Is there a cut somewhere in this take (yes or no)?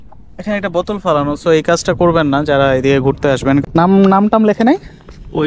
yes